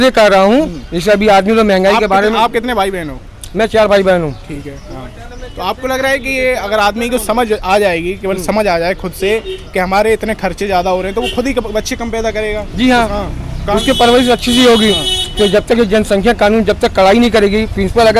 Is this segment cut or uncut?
uncut